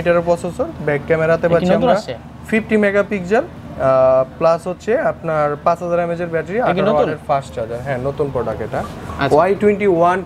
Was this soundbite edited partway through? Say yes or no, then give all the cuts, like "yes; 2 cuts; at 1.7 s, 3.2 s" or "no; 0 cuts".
no; 0 cuts